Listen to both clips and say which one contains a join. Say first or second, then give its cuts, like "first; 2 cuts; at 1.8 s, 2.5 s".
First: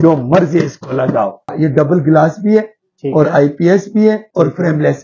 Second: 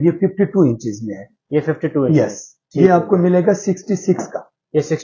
first; 1 cut; at 1.5 s